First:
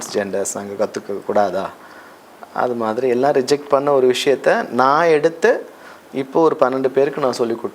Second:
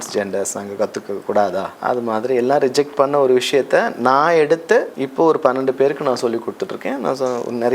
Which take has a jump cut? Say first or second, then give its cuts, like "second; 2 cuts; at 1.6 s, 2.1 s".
second; 2 cuts; at 1.7 s, 5.0 s